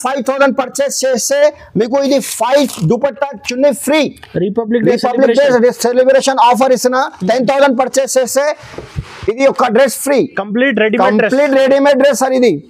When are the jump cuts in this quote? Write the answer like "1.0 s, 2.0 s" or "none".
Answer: none